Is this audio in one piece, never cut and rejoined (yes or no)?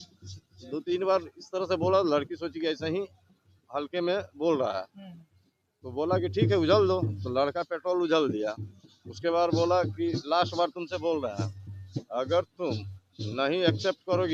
yes